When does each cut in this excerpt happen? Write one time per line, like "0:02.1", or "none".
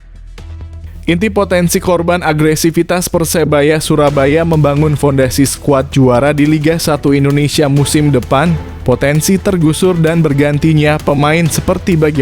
0:01.0